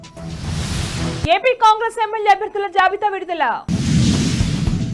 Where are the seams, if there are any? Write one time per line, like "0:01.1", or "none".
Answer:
0:01.0